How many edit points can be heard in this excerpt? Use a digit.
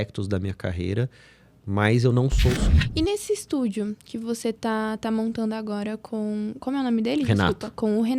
1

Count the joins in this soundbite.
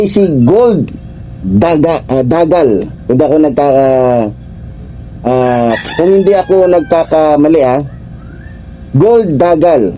0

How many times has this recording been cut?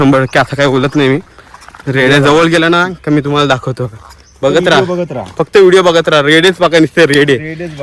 0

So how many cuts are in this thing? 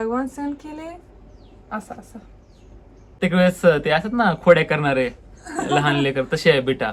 1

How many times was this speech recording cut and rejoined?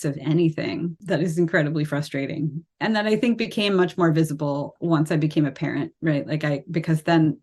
3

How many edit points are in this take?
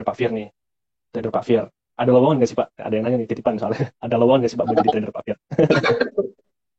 0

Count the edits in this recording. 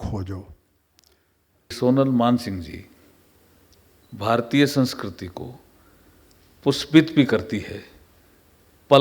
1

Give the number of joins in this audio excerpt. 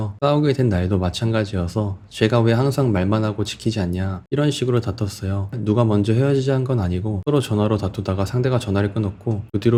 0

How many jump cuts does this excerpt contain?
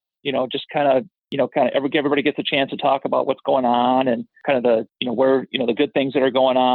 2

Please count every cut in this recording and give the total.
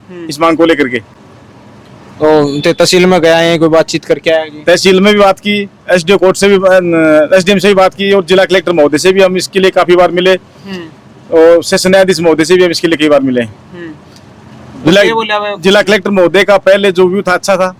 0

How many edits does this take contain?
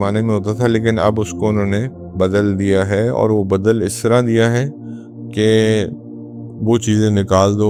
0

